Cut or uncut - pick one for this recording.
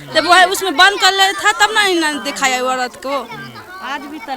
uncut